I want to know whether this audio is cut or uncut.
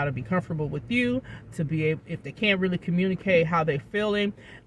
uncut